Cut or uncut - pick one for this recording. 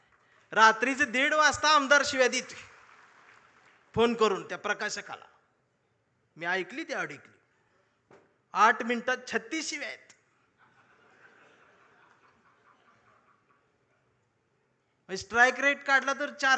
uncut